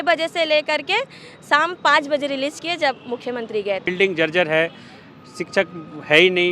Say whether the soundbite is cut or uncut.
cut